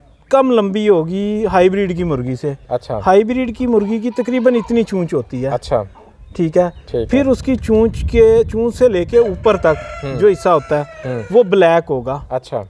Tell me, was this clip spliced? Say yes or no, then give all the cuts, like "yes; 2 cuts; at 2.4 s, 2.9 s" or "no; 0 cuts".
no; 0 cuts